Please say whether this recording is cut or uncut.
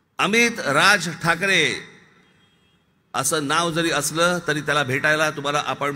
uncut